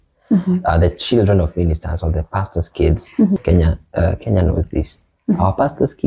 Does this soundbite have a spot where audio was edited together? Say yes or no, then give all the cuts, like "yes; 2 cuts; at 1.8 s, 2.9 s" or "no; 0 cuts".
yes; 1 cut; at 3.4 s